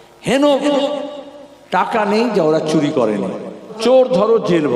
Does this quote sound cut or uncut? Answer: cut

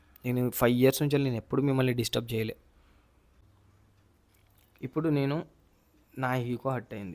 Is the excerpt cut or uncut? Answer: cut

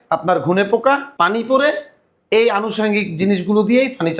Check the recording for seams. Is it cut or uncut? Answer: uncut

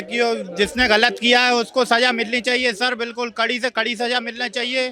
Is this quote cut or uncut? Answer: uncut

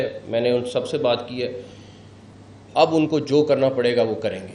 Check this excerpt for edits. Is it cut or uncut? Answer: uncut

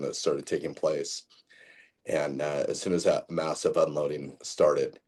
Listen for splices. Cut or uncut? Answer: uncut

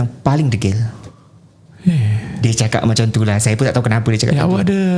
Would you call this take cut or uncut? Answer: uncut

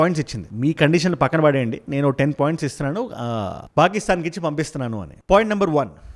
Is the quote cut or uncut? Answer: uncut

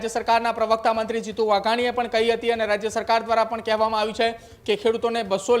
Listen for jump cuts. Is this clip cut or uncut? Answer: uncut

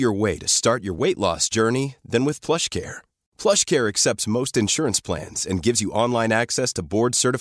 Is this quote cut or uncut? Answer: uncut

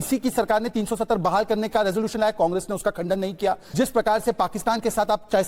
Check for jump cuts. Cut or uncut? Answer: cut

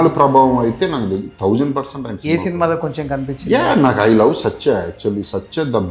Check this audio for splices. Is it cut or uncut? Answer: uncut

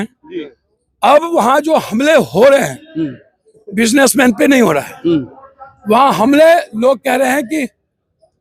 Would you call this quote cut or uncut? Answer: uncut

